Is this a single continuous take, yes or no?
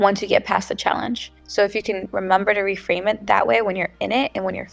no